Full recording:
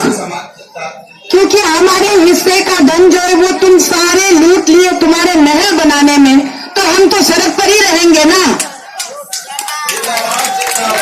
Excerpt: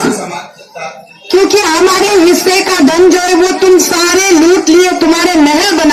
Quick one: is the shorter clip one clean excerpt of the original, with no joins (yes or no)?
yes